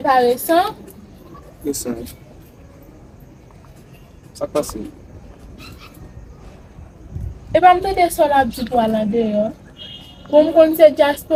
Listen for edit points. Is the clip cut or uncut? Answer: uncut